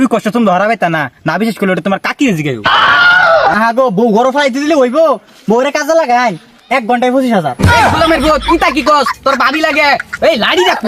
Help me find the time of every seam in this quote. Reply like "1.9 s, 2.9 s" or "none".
3.5 s